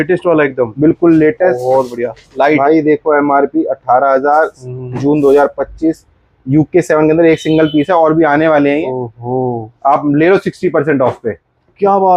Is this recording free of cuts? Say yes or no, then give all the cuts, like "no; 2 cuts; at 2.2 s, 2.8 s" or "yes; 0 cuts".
yes; 0 cuts